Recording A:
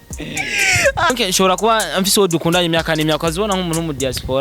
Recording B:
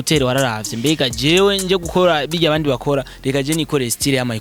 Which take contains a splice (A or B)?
A